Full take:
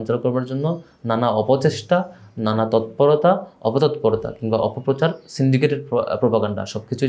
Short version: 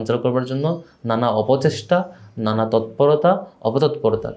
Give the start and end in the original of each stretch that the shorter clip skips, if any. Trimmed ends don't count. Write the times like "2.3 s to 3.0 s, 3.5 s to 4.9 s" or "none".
none

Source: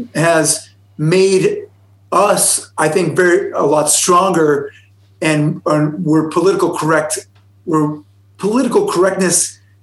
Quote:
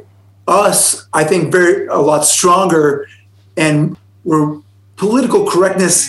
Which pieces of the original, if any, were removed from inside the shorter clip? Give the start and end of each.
5.6 s to 7.3 s

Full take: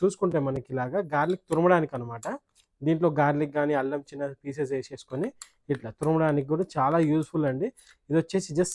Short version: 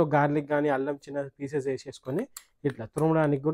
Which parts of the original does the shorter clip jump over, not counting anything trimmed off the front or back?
none

